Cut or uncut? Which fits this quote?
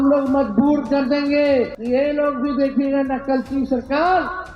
cut